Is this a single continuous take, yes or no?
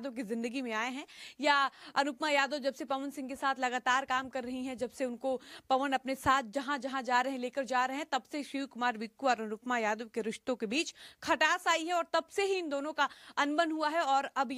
yes